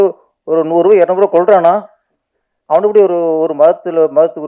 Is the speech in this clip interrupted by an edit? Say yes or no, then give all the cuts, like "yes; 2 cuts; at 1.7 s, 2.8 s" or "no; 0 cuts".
no; 0 cuts